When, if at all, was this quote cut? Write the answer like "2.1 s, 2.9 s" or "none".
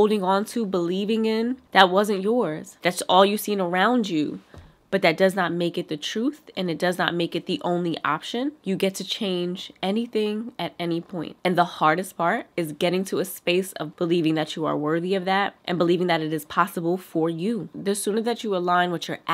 1.6 s, 2.8 s, 8.6 s, 13.8 s